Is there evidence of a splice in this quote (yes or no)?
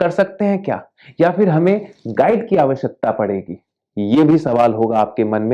no